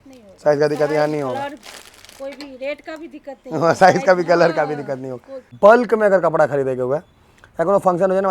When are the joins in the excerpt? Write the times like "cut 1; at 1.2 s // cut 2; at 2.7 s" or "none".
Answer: cut 1; at 5.4 s